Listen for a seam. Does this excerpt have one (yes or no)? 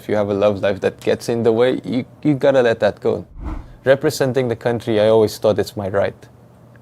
yes